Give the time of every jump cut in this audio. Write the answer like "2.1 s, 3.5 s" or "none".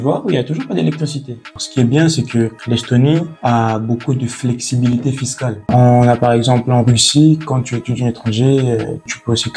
1.6 s, 5.6 s